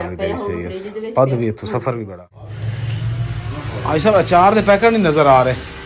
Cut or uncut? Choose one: cut